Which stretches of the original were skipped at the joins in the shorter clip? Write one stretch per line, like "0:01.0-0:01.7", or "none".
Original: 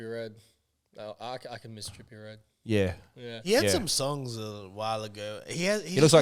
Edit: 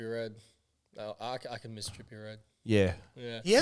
none